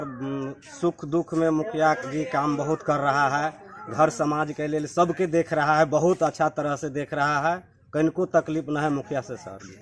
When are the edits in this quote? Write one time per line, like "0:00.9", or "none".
none